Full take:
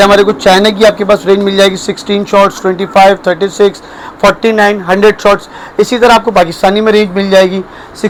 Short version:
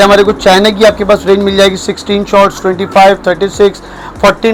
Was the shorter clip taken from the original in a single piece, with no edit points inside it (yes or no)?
yes